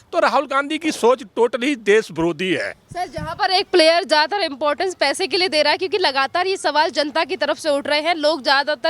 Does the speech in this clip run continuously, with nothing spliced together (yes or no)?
yes